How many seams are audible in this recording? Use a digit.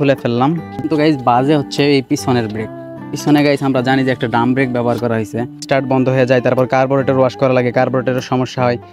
2